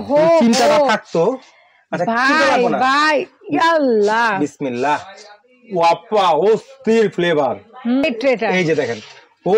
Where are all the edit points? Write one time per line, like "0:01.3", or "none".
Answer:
0:08.0